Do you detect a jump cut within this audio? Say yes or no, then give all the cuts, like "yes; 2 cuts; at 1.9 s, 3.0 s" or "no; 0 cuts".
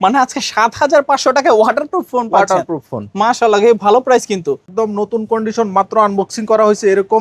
yes; 1 cut; at 4.7 s